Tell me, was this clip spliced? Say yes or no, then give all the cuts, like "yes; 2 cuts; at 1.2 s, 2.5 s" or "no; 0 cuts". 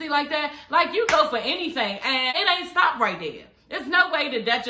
yes; 1 cut; at 2.4 s